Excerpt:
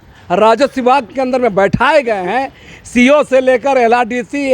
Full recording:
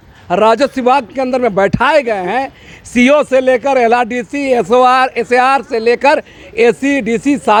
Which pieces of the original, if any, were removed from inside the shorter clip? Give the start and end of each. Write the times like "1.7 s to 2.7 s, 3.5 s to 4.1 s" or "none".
none